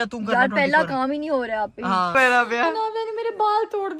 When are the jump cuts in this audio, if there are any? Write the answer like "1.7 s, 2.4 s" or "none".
2.1 s